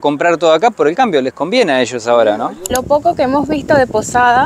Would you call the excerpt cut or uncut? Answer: cut